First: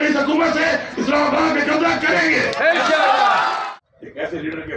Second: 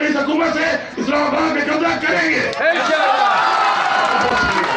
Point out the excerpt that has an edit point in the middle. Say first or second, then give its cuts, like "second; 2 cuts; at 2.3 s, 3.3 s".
first; 1 cut; at 3.6 s